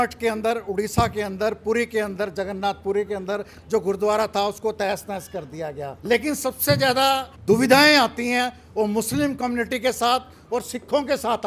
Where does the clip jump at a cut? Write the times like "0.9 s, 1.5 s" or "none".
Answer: 5.9 s, 7.3 s